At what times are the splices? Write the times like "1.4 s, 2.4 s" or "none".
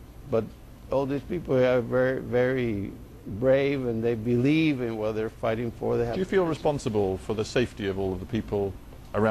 5.0 s